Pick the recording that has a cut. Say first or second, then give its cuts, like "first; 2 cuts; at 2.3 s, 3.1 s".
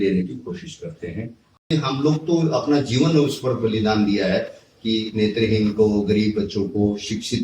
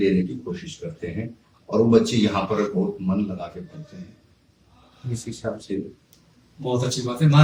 first; 1 cut; at 1.7 s